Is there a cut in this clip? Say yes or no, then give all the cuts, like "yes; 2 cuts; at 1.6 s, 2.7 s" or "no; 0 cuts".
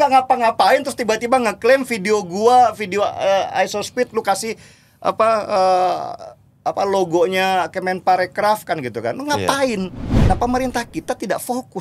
yes; 1 cut; at 10.1 s